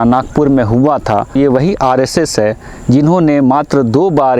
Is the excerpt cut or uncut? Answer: cut